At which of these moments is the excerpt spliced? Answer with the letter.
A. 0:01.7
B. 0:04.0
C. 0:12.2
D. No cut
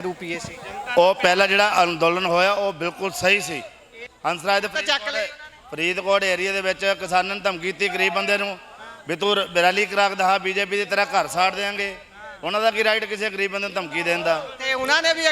B